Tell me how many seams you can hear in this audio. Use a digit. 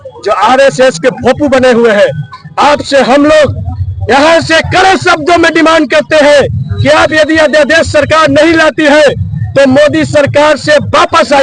0